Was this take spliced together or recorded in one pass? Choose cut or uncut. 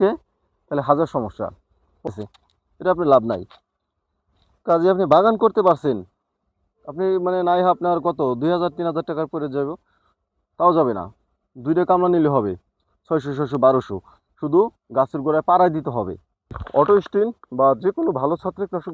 cut